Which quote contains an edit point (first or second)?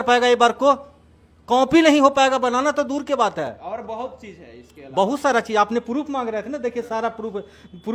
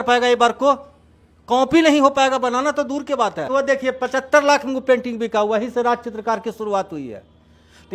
second